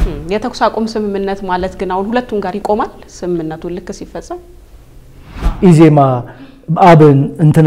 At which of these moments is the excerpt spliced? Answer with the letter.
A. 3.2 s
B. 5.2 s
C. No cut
B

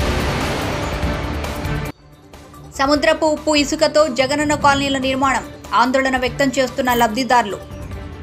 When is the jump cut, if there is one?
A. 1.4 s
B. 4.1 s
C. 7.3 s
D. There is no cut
A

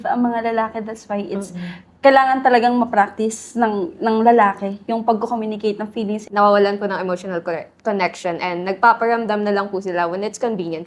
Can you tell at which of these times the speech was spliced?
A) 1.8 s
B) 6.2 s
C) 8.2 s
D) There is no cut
B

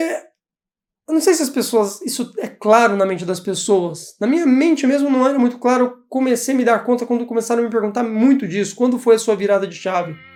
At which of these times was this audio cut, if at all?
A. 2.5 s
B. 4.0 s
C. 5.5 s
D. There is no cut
D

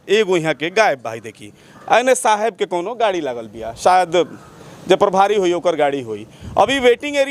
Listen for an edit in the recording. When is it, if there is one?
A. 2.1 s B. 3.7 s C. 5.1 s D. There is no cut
D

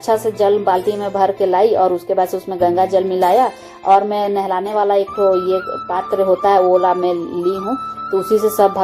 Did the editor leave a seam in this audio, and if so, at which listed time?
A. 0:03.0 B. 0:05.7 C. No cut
C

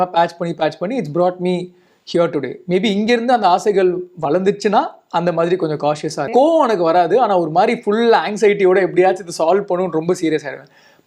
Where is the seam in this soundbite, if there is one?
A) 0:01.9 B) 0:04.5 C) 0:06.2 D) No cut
C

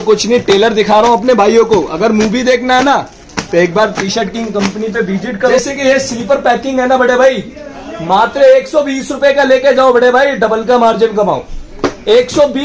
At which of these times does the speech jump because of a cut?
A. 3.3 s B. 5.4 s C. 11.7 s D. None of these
B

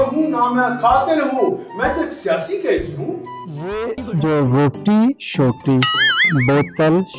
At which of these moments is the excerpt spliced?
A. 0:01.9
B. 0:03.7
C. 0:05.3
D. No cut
B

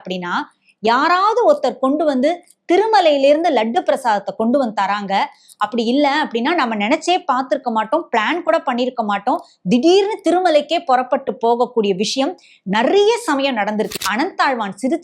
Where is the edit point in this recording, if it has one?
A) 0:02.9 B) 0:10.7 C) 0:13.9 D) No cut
C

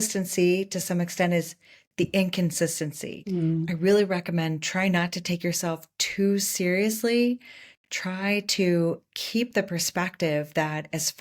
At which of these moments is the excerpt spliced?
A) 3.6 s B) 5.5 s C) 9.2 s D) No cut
A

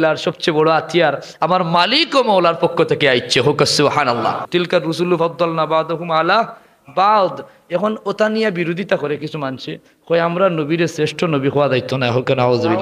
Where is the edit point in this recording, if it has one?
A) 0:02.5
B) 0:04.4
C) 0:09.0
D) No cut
B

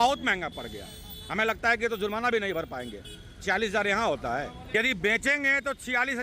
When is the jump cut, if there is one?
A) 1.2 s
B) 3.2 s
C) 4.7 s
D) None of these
C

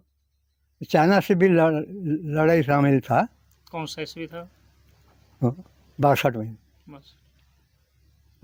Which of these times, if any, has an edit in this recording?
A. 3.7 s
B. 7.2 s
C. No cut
C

